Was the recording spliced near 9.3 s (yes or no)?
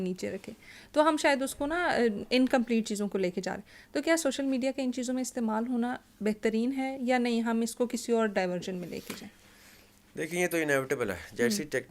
no